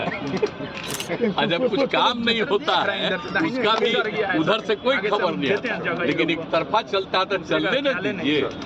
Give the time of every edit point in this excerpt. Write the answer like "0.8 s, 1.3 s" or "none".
none